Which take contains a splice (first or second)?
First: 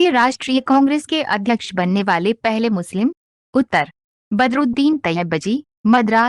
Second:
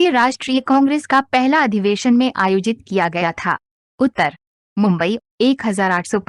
first